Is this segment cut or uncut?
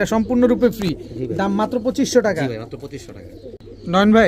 uncut